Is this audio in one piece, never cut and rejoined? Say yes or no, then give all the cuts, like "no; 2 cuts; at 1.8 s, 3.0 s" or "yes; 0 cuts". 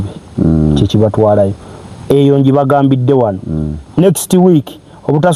yes; 0 cuts